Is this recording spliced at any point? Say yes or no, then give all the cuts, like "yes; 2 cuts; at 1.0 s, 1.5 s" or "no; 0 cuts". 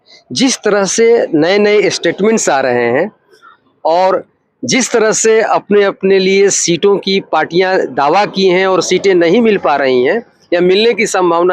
no; 0 cuts